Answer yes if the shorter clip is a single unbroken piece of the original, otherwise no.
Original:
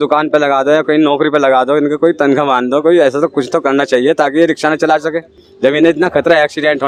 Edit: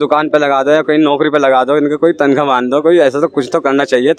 yes